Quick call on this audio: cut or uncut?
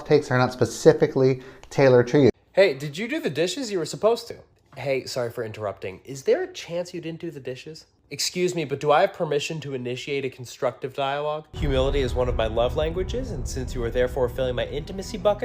cut